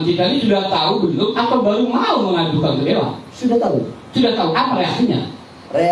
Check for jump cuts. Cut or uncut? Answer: uncut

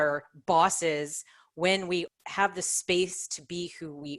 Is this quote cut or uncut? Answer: cut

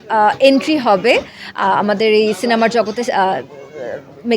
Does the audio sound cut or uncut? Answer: uncut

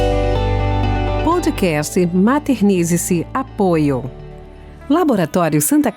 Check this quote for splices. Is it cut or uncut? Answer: cut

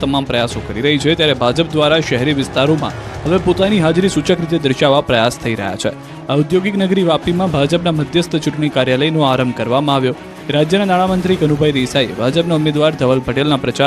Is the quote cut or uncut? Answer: cut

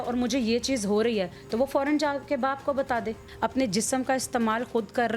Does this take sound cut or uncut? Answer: cut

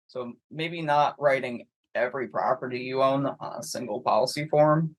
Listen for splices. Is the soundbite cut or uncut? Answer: uncut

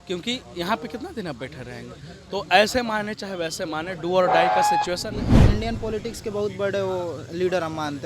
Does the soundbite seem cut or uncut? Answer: cut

